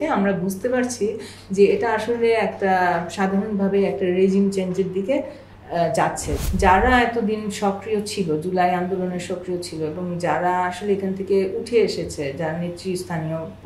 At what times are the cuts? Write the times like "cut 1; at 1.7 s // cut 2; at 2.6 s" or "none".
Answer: cut 1; at 6.3 s